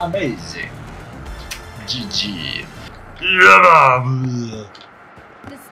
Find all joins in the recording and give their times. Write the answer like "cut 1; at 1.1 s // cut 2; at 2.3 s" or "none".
cut 1; at 2.9 s